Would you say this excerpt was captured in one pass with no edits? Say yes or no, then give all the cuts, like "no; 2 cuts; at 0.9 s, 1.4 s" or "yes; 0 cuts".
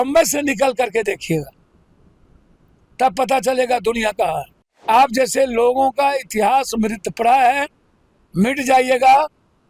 no; 1 cut; at 4.8 s